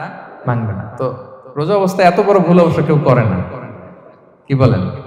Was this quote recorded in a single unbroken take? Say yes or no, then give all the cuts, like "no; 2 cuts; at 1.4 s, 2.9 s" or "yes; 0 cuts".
yes; 0 cuts